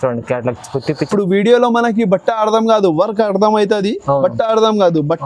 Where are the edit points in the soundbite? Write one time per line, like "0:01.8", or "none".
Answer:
0:01.1